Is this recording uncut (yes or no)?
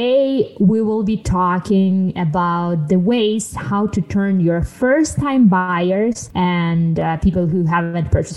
yes